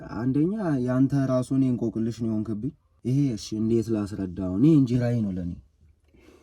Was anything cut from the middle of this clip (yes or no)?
yes